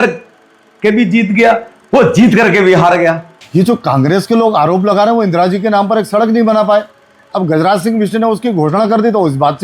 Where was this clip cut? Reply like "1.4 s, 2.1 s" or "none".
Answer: 3.3 s